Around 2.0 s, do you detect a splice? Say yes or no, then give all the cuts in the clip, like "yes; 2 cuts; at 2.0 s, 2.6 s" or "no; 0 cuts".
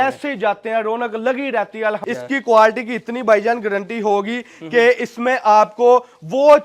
yes; 1 cut; at 2.0 s